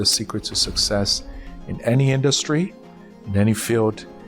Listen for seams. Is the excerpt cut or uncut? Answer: uncut